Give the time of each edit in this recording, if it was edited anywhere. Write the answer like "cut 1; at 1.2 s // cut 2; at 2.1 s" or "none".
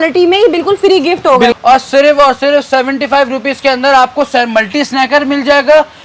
cut 1; at 1.5 s